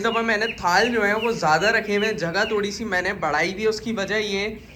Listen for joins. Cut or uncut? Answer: uncut